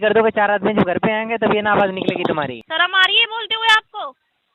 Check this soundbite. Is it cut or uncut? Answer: cut